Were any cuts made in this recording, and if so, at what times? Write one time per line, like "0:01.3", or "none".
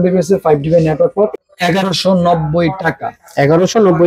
0:01.3